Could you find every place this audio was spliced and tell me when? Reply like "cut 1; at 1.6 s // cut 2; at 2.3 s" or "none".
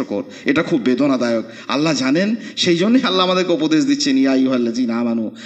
none